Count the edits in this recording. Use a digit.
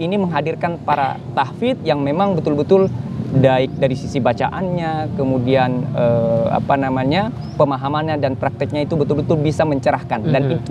0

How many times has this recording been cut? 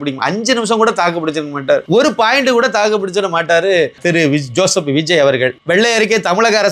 3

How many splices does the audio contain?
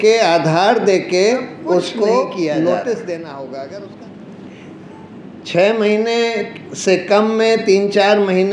1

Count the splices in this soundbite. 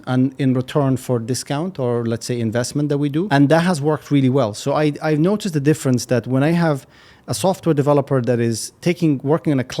1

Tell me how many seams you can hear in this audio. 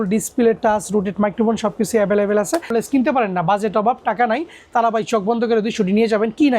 1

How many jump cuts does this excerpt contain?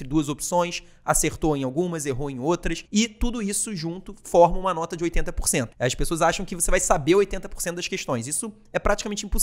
2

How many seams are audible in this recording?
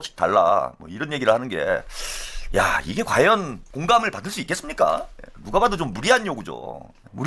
0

